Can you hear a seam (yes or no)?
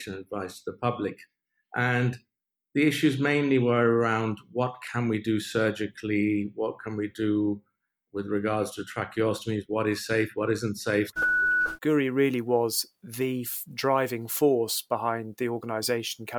yes